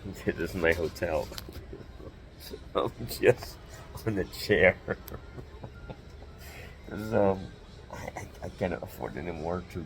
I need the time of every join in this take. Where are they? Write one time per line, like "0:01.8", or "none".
none